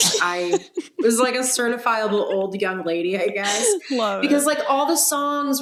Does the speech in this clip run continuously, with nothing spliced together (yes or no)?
yes